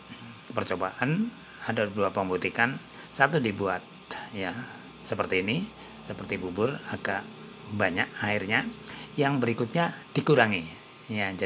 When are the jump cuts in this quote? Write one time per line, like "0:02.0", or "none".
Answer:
none